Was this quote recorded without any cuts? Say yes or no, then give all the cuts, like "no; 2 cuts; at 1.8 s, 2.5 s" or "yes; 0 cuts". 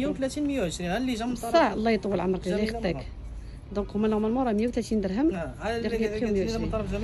yes; 0 cuts